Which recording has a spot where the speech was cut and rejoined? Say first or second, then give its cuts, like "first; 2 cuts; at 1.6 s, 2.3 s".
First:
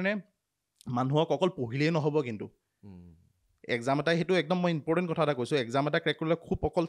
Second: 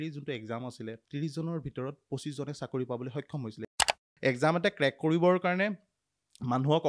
second; 2 cuts; at 1.0 s, 3.9 s